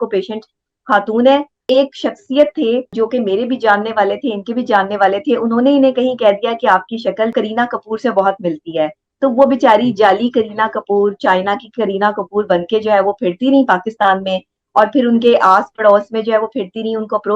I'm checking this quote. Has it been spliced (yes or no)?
yes